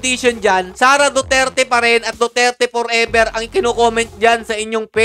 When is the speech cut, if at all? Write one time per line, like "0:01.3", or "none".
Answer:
none